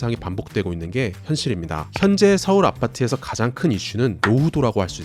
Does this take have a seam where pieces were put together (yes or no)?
yes